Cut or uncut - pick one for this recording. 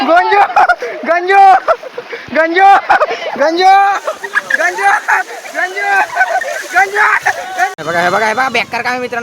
cut